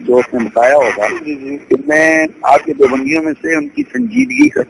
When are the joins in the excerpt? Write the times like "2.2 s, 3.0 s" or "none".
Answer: 1.5 s